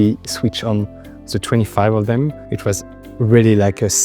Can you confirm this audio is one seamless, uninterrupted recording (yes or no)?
no